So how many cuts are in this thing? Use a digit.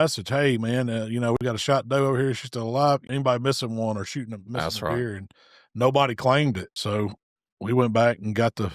3